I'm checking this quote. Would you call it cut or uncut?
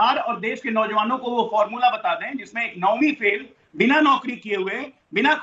uncut